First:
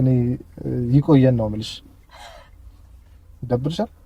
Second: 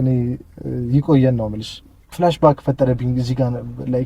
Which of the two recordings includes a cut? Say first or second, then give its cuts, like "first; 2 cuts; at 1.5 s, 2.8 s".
second; 1 cut; at 2.0 s